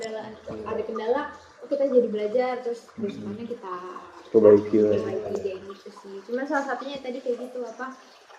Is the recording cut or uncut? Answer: uncut